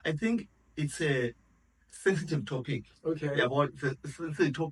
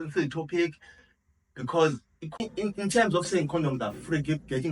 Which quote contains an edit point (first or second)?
second